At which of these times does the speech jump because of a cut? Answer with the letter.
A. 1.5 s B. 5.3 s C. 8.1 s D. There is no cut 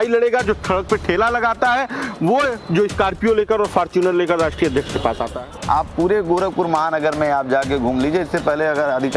B